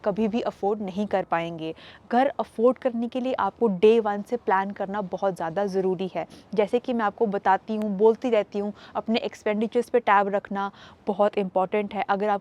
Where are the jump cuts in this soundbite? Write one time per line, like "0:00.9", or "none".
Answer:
none